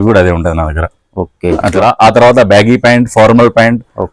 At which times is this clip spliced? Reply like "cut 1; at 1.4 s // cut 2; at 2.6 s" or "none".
cut 1; at 1.8 s